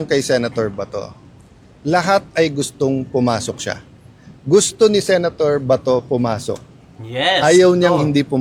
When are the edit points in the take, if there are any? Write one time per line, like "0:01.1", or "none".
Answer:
none

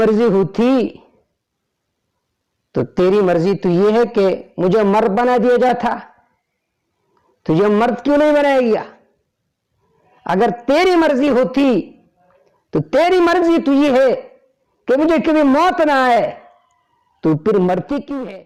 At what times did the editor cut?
none

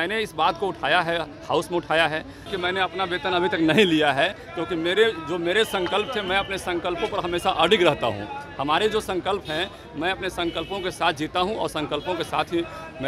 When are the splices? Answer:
0:02.5

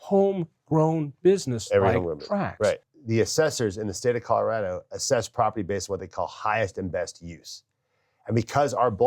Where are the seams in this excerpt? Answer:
0:02.9

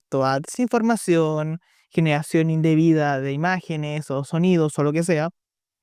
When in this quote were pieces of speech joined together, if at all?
none

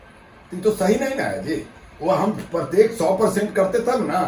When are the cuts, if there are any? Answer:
none

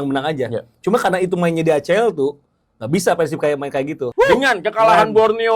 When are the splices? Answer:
0:04.0

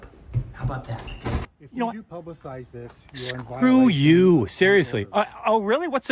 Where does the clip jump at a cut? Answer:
0:01.6

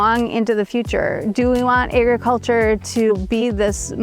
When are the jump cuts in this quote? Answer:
0:01.3
0:03.1

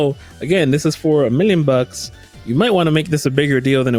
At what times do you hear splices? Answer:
none

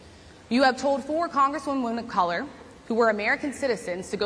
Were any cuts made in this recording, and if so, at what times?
none

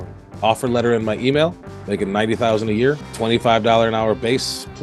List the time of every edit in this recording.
0:01.7

